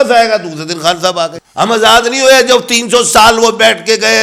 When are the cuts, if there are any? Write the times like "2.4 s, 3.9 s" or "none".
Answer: 1.4 s